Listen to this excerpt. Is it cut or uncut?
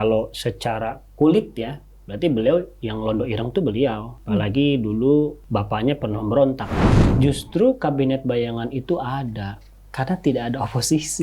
cut